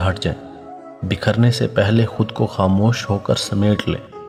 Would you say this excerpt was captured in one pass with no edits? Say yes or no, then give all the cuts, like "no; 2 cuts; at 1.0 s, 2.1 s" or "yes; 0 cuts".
yes; 0 cuts